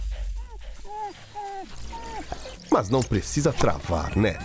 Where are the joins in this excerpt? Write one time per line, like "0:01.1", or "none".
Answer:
none

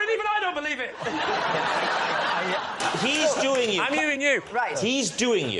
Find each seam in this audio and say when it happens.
0:02.8

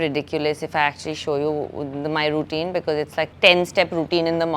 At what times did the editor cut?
0:03.3

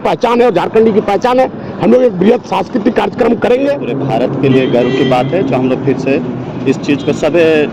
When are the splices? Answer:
0:03.9

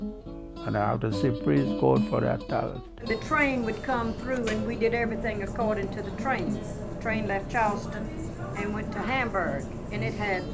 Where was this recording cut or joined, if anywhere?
0:02.9

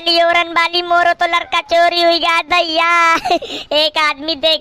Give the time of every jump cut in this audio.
0:03.4

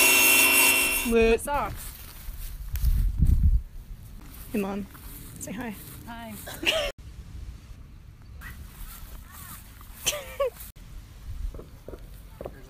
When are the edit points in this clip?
0:00.9
0:01.9

